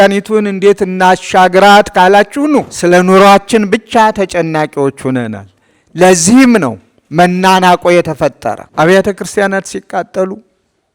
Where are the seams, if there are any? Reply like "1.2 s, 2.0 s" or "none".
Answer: 2.7 s, 8.6 s